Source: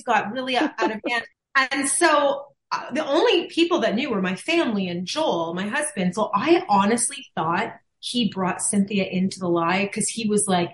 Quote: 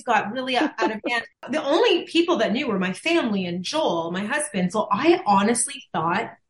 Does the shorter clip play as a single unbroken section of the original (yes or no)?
no